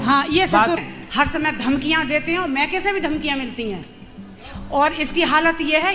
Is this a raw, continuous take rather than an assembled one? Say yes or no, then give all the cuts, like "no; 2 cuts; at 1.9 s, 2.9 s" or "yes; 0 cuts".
no; 1 cut; at 0.9 s